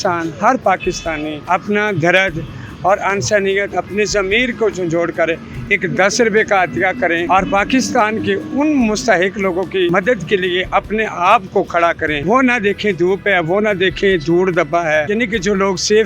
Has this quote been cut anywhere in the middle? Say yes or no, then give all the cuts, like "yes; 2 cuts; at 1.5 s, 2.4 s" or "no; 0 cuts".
no; 0 cuts